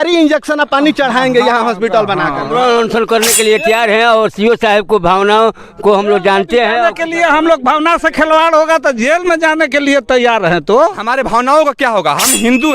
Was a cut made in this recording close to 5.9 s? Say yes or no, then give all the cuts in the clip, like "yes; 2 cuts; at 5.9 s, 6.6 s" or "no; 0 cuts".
no; 2 cuts; at 2.5 s, 11.0 s